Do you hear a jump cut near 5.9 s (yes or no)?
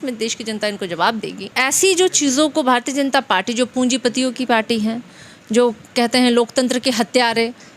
no